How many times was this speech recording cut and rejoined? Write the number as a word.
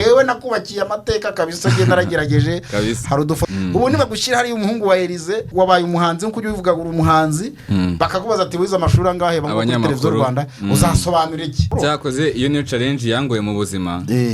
four